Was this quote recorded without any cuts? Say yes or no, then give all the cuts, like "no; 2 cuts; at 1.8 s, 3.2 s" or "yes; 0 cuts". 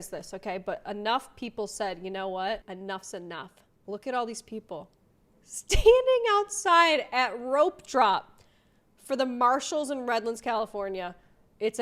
yes; 0 cuts